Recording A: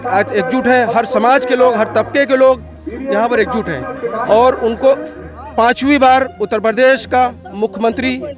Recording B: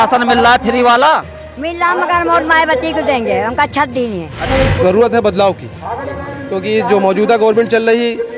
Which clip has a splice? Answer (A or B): B